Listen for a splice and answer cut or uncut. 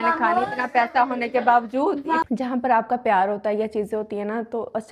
cut